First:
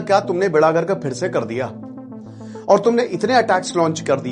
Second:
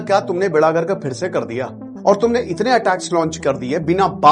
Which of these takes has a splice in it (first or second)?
second